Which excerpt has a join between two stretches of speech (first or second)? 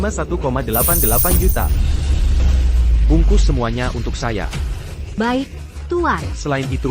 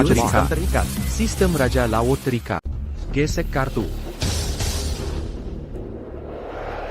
second